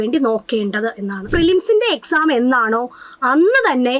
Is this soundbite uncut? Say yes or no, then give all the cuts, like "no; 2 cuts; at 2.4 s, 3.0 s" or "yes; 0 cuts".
no; 1 cut; at 1.3 s